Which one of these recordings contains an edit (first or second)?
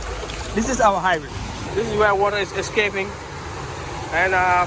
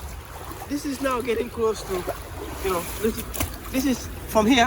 first